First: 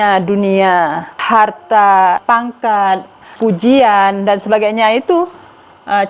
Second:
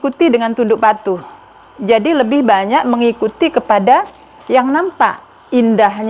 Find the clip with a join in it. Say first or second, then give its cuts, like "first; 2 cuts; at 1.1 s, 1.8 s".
first; 3 cuts; at 1.1 s, 2.2 s, 3.3 s